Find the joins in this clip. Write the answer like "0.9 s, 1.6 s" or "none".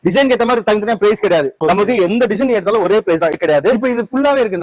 1.5 s, 3.4 s